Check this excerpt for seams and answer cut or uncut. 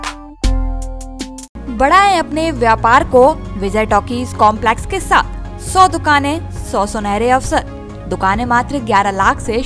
uncut